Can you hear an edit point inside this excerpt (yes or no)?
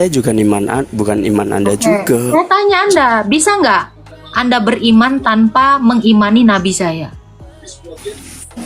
no